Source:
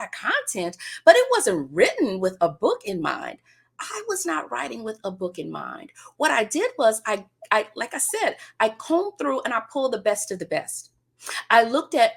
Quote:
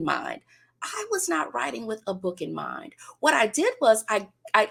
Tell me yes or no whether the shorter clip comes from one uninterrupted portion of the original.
yes